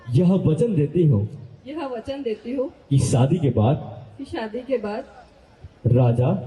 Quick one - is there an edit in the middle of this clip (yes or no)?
no